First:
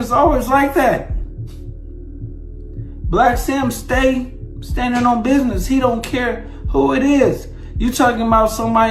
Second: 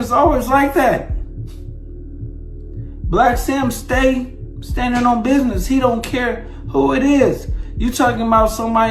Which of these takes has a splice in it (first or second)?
second